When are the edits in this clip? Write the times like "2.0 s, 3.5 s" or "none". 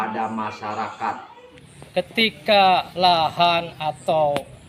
1.9 s